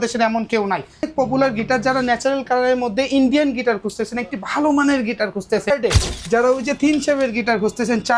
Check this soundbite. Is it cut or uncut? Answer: cut